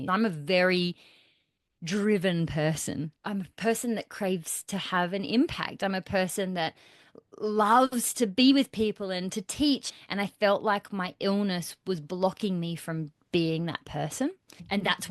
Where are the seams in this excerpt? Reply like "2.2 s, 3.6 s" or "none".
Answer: 3.1 s, 9.9 s